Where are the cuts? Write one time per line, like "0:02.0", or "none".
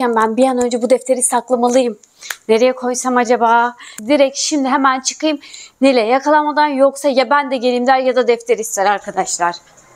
0:04.0